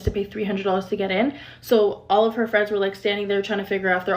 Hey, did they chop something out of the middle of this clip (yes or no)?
yes